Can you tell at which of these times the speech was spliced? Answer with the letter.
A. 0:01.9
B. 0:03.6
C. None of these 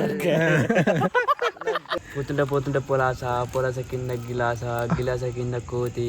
A